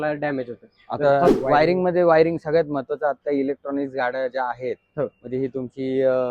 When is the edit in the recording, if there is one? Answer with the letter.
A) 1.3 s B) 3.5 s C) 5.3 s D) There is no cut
A